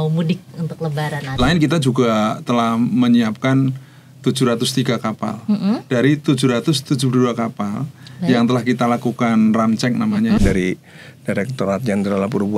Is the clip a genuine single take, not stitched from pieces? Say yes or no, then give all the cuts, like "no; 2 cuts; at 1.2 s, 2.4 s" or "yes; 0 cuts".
no; 2 cuts; at 1.4 s, 10.4 s